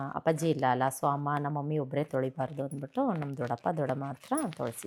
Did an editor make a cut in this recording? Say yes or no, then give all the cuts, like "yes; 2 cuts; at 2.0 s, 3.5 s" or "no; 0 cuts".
no; 0 cuts